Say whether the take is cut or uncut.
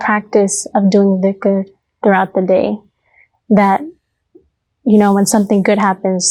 uncut